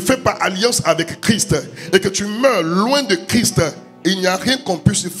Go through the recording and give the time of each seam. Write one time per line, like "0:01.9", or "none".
none